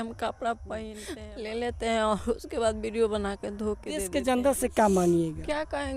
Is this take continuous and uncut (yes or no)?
no